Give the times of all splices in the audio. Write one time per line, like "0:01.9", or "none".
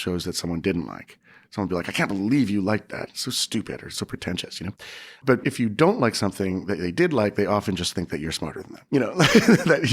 0:05.3
0:08.7

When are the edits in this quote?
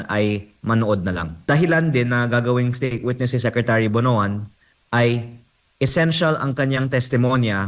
0:01.3

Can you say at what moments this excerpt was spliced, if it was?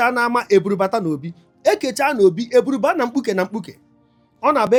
none

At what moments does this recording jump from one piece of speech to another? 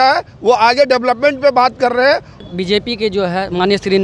0:02.4

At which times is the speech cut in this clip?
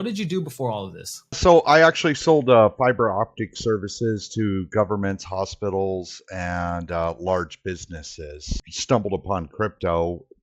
0:01.4
0:08.5

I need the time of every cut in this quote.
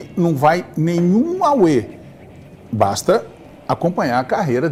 none

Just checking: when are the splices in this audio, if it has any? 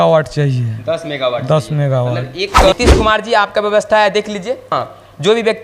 0:02.7
0:04.7

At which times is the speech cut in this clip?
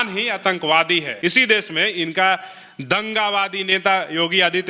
0:01.1

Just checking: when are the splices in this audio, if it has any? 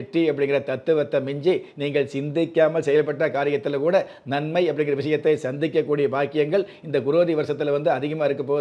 none

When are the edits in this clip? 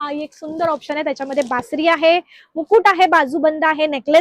none

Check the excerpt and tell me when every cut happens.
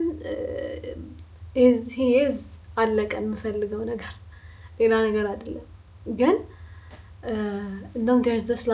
none

